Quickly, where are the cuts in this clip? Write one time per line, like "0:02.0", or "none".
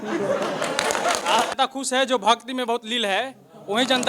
0:01.6